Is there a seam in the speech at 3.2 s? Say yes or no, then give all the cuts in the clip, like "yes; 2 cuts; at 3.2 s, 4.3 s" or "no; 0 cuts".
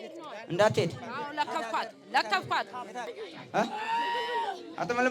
yes; 1 cut; at 3.2 s